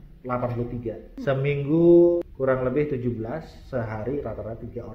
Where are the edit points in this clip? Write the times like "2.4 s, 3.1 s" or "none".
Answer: 1.2 s, 2.3 s